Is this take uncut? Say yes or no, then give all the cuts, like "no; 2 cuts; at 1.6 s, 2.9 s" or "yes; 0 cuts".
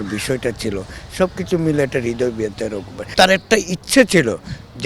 no; 1 cut; at 3.1 s